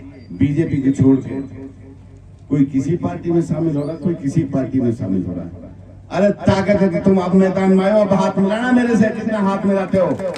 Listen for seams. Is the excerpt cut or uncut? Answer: uncut